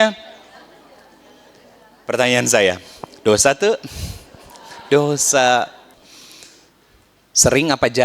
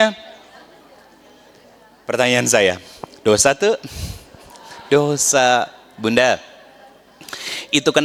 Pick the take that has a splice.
first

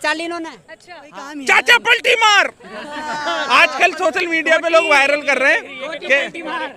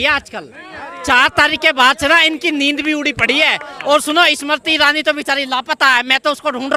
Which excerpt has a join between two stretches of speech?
first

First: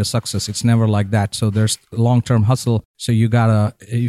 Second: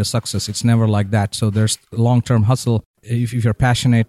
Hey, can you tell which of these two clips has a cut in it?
second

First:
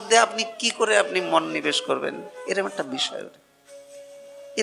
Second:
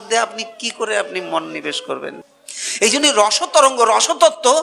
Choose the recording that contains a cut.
second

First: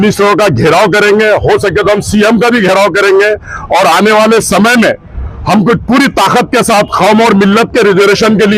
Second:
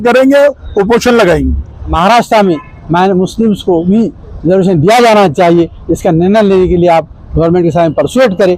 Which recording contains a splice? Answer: second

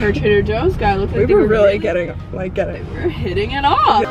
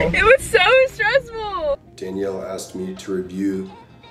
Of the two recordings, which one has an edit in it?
second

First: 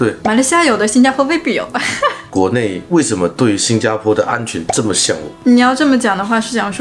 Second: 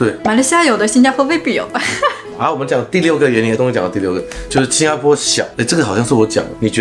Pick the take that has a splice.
first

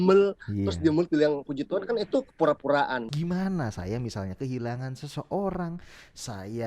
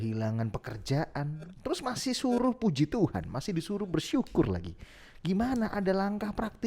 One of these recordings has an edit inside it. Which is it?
first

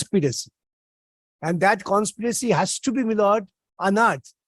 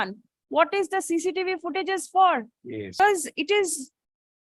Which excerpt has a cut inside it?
second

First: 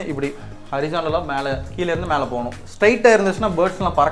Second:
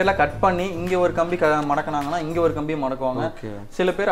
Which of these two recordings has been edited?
first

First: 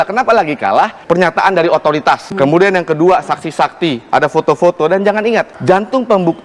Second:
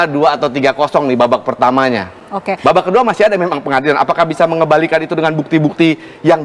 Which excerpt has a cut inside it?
first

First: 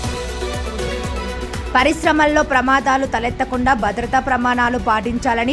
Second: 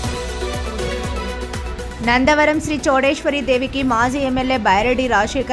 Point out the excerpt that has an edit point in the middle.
first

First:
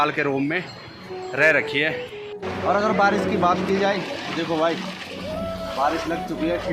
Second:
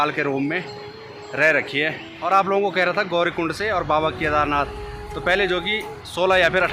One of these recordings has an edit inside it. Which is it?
first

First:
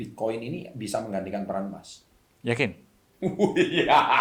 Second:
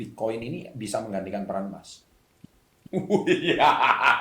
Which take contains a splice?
second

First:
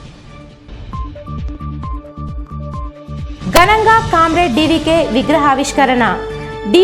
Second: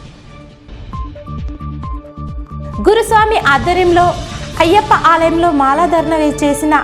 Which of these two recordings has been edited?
first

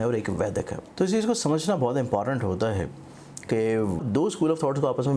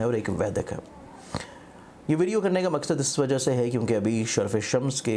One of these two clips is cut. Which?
first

